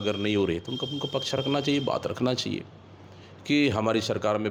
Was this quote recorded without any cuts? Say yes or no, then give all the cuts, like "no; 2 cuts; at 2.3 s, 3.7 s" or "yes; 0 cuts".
yes; 0 cuts